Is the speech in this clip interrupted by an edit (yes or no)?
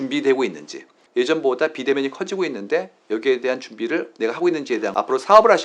yes